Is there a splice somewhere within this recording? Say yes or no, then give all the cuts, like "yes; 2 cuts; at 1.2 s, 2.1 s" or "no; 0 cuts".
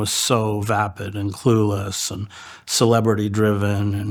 no; 0 cuts